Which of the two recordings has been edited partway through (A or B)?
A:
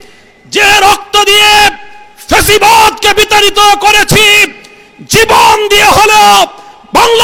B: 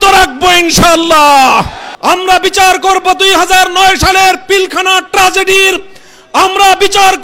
B